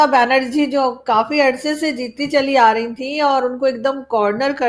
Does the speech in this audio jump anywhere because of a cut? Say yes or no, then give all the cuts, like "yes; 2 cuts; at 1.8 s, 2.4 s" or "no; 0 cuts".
no; 0 cuts